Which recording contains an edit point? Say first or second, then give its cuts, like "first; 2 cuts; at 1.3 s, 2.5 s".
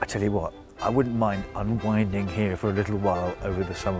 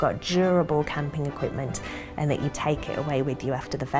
second; 1 cut; at 2.5 s